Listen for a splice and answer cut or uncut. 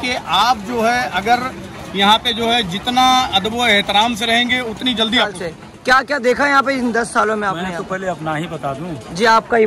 cut